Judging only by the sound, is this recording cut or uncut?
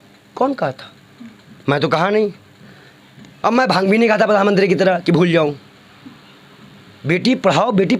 uncut